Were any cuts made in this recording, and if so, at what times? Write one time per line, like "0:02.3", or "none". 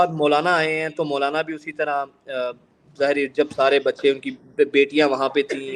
none